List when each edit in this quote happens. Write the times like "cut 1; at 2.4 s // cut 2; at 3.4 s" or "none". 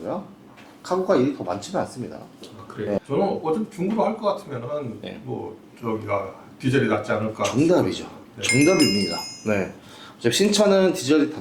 cut 1; at 3.0 s